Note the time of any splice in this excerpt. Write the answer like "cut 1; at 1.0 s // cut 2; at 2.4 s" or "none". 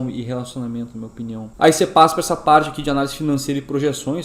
cut 1; at 1.4 s